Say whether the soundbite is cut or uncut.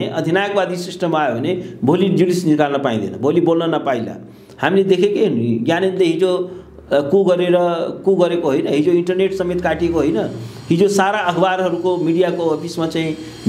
uncut